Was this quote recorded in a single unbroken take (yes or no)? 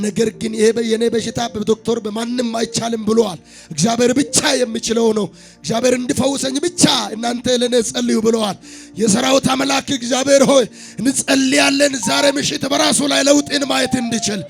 yes